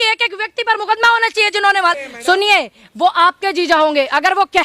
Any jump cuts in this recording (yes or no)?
yes